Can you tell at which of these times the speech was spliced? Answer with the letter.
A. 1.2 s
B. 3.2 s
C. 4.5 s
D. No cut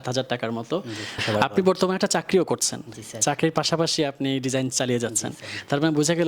A